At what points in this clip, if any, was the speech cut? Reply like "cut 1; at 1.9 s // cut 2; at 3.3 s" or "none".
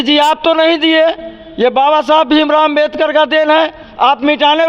none